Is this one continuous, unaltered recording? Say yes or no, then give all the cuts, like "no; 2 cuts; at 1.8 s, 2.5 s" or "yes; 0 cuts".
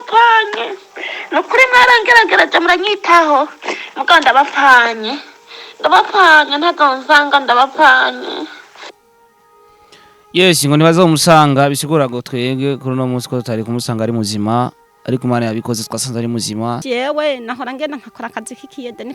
no; 1 cut; at 16.8 s